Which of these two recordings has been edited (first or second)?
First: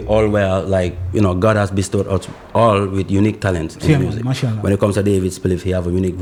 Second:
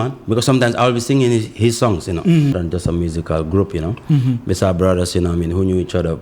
second